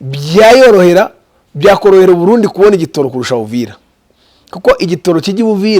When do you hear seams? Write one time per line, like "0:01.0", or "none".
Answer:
none